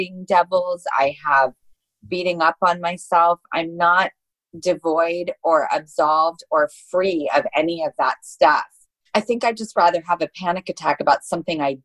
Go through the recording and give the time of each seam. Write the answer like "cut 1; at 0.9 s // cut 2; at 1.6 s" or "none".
none

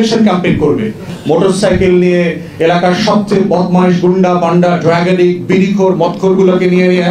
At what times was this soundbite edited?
cut 1; at 1.1 s

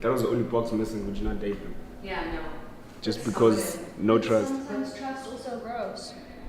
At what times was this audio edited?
cut 1; at 4.7 s

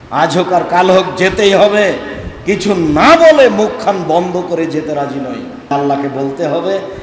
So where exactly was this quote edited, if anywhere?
cut 1; at 5.7 s

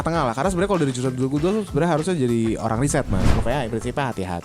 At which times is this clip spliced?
cut 1; at 3.3 s

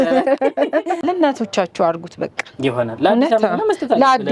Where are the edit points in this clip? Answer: cut 1; at 1.0 s

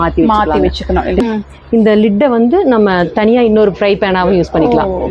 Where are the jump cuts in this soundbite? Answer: cut 1; at 1.2 s

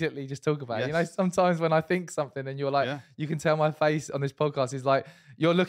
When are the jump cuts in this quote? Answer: none

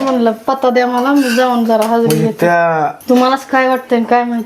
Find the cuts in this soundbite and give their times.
cut 1; at 3.2 s

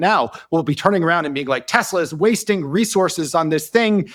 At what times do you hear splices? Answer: none

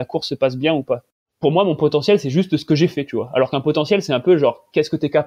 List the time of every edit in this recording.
cut 1; at 1.1 s

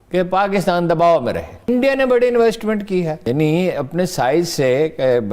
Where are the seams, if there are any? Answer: cut 1; at 1.6 s // cut 2; at 3.2 s

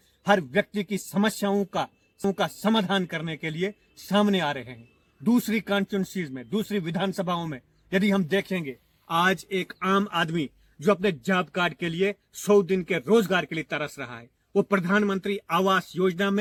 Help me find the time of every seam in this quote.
none

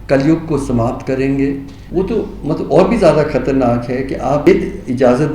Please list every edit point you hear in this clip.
cut 1; at 1.7 s // cut 2; at 4.4 s

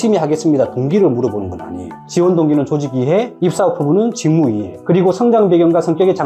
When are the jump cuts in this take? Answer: none

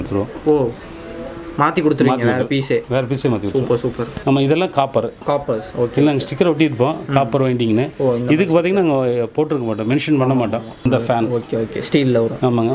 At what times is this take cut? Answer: cut 1; at 4.2 s // cut 2; at 10.8 s

